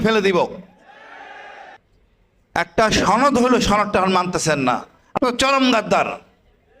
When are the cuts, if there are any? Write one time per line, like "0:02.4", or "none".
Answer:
0:01.8